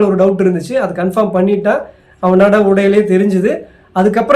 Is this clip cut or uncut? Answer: uncut